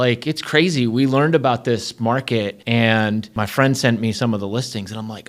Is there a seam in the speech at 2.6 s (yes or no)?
yes